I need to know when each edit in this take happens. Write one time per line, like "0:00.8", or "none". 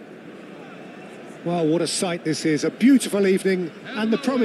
0:01.4